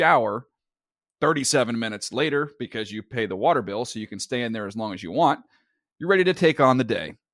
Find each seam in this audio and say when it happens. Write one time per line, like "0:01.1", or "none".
none

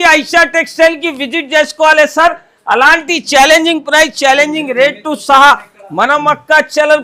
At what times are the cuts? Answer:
none

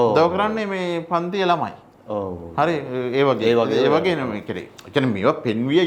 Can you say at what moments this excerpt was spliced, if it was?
none

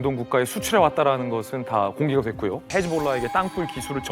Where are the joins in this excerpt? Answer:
0:02.6

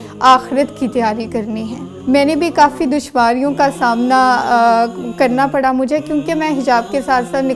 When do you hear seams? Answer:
0:01.9

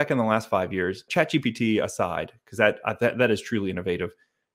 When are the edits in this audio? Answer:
0:01.1

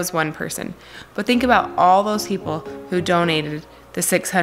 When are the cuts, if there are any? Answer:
none

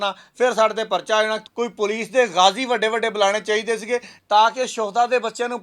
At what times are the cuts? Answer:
0:01.4
0:04.1

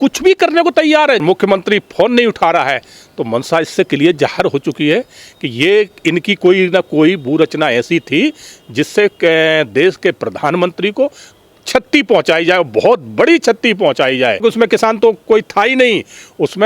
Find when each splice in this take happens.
0:01.2
0:14.4

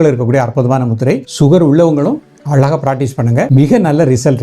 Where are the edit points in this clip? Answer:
0:01.3
0:03.5

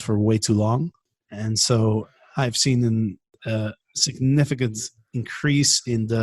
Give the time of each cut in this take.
0:01.0
0:03.3

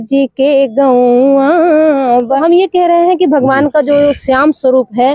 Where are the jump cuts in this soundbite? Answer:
0:02.4

